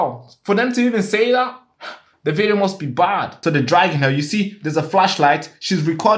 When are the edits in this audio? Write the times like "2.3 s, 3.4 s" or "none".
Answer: 3.3 s